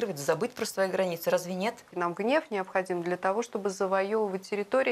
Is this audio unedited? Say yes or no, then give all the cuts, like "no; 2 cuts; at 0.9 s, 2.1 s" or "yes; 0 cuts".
no; 1 cut; at 1.9 s